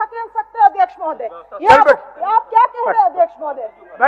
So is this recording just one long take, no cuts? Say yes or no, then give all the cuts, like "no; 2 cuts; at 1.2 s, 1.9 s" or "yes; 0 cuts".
yes; 0 cuts